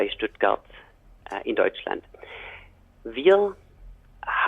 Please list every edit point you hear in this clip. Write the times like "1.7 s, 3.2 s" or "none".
none